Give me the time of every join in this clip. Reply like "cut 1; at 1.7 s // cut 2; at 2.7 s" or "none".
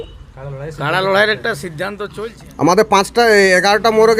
cut 1; at 2.0 s